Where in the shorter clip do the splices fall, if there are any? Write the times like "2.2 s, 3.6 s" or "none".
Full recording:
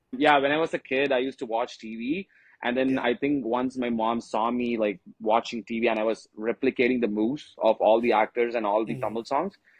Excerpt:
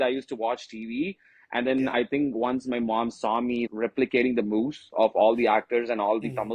3.7 s